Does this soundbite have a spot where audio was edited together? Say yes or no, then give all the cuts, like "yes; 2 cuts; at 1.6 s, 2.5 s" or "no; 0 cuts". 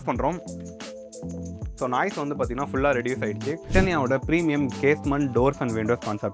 yes; 1 cut; at 3.7 s